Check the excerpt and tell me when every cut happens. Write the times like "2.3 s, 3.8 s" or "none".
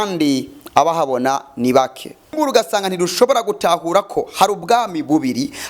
2.3 s